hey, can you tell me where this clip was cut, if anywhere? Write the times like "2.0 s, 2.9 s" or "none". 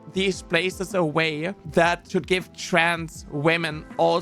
2.0 s